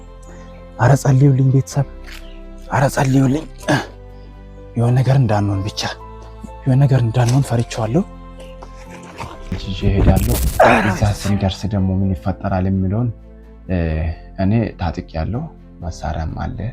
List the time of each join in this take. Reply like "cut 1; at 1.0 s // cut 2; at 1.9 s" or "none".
cut 1; at 10.9 s